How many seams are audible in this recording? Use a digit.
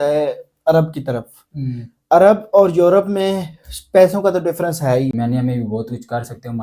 1